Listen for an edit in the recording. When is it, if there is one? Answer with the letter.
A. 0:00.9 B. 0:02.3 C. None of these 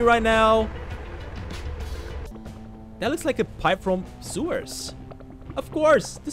B